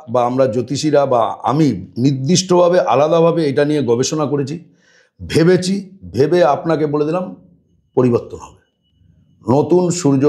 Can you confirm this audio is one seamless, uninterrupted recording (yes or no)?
yes